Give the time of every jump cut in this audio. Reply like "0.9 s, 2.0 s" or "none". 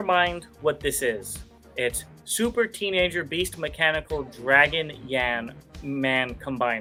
none